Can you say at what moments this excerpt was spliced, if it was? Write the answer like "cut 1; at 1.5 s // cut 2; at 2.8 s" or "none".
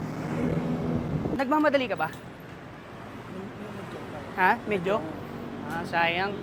none